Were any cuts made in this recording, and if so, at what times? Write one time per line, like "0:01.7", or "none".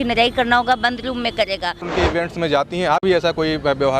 0:01.8

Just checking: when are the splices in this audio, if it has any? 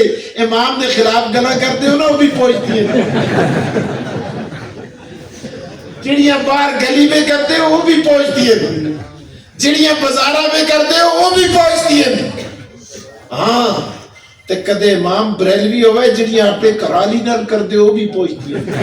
none

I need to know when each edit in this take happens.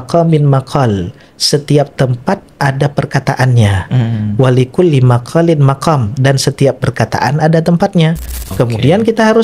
0:08.5

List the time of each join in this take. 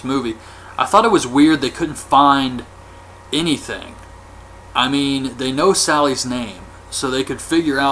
0:03.3

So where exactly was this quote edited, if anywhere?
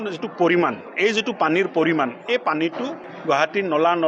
0:03.1

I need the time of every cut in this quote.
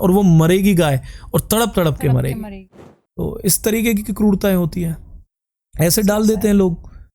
0:02.6

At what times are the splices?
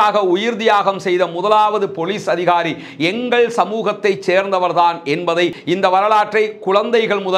0:05.6

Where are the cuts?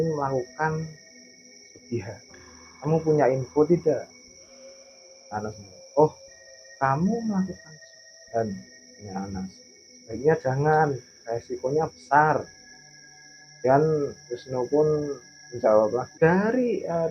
0:16.1

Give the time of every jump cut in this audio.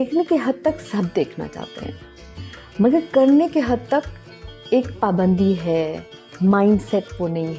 none

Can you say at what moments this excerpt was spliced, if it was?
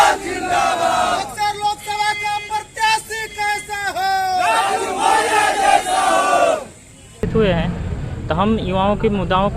0:07.2

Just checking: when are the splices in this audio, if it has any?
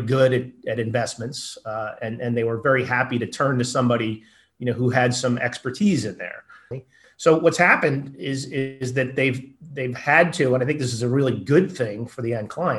0:06.9

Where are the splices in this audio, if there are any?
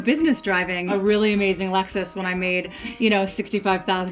0:00.9

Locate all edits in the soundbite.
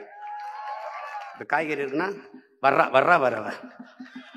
0:01.3

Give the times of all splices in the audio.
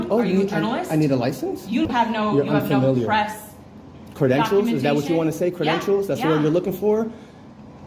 0:01.9

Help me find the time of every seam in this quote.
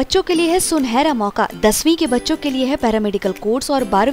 none

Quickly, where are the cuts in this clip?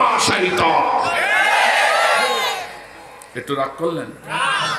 none

